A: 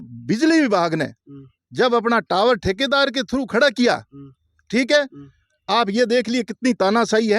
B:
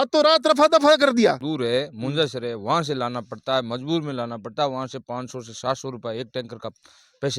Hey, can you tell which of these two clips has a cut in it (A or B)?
B